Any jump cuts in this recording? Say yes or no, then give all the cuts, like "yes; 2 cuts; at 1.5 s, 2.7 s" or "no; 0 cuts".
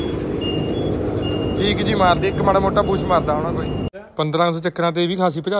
yes; 1 cut; at 3.9 s